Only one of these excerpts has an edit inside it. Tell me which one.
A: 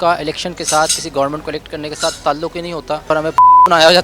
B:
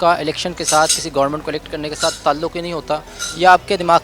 A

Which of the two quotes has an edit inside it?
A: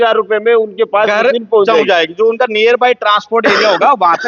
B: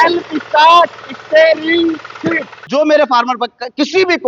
B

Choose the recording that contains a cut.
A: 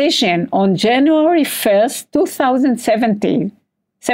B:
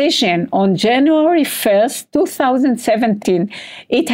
B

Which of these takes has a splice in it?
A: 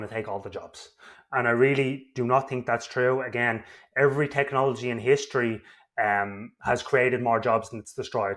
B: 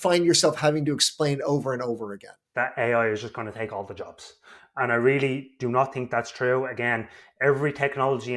B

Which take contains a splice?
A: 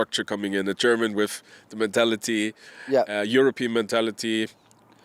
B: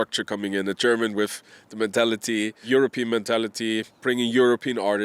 B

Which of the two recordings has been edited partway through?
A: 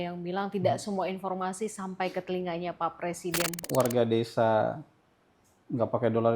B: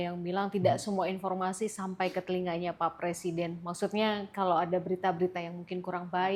A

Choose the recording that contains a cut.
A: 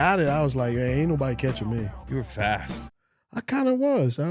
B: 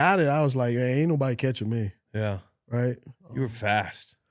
A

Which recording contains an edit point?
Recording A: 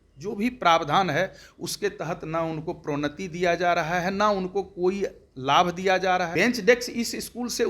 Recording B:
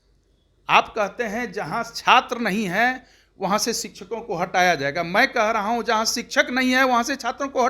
A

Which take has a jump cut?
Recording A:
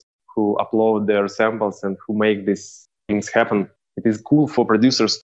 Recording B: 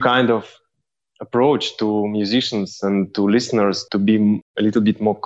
A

